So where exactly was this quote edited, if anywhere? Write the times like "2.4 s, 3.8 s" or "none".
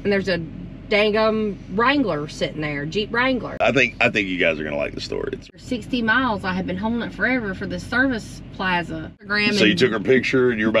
3.6 s, 5.5 s, 9.3 s